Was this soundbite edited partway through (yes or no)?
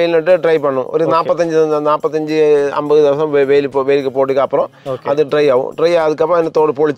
no